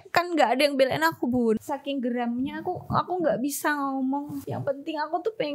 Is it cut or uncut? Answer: cut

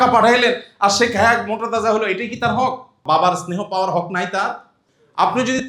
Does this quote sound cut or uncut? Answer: cut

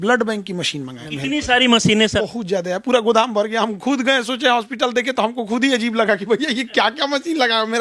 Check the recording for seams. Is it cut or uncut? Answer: cut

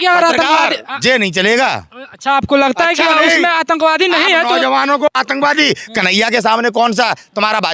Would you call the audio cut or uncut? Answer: uncut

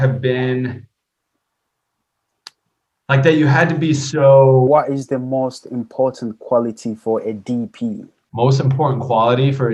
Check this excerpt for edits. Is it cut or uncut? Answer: cut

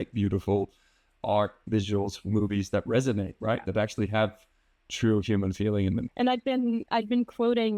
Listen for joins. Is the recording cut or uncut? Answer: uncut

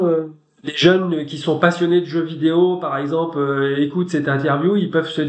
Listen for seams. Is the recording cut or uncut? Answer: uncut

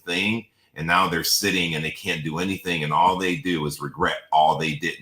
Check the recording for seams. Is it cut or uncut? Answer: uncut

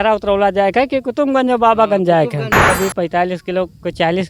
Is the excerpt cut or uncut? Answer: cut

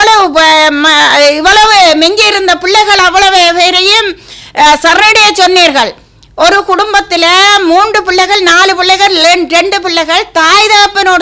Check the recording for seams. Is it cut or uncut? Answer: uncut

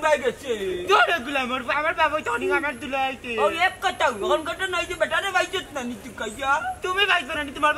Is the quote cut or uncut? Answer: uncut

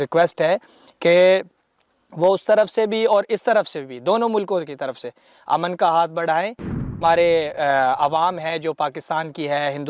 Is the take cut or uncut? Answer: cut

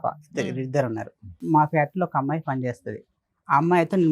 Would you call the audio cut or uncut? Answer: cut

